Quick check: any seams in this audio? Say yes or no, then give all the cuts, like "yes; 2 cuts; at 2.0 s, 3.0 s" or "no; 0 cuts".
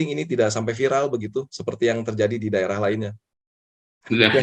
no; 0 cuts